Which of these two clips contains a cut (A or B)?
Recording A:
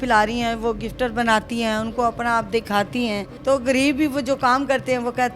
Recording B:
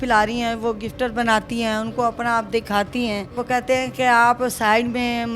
B